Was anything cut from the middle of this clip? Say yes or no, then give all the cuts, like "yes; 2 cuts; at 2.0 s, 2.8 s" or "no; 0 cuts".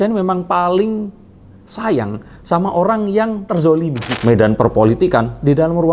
yes; 1 cut; at 4.1 s